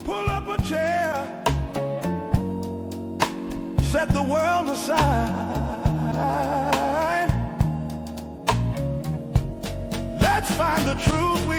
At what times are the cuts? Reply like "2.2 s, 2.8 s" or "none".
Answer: none